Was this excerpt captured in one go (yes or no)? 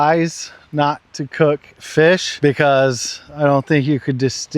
no